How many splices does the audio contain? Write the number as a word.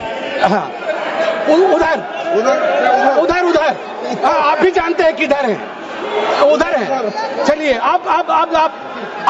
zero